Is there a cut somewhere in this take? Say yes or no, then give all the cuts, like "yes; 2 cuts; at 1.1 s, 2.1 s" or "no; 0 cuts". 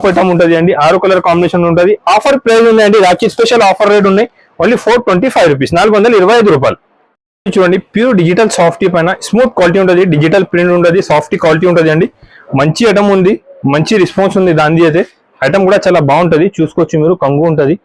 no; 0 cuts